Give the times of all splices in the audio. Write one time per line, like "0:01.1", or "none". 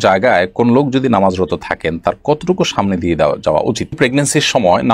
0:03.9